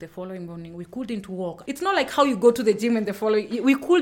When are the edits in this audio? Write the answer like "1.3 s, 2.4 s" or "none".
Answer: 1.6 s